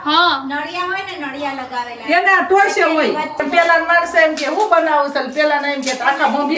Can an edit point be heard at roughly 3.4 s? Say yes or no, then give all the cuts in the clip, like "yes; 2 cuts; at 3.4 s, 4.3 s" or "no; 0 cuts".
yes; 1 cut; at 3.4 s